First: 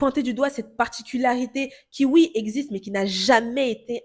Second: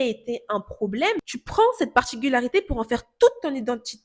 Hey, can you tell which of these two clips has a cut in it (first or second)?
second